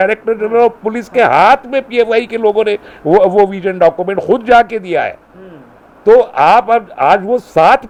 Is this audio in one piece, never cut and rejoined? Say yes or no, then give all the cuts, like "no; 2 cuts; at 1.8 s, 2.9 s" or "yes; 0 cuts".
yes; 0 cuts